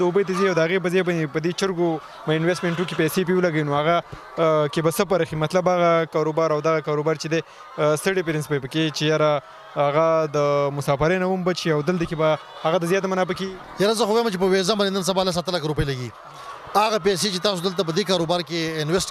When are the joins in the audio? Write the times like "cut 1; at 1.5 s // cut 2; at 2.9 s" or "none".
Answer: none